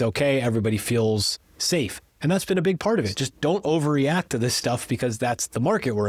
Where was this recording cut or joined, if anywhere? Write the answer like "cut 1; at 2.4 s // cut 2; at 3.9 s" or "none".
none